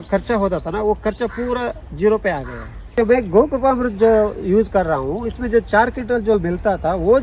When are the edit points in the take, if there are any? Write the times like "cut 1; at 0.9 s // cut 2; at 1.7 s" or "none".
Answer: cut 1; at 2.8 s